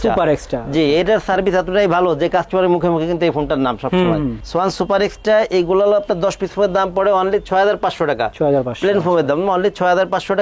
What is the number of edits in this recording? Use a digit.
0